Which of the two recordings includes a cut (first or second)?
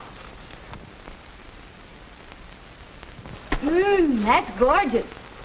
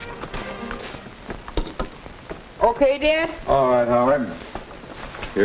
second